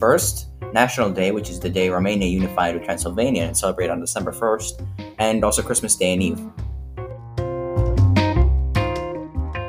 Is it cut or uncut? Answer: uncut